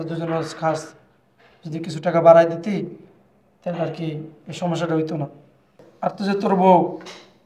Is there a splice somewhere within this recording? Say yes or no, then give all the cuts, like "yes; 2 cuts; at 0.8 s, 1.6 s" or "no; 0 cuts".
yes; 1 cut; at 5.8 s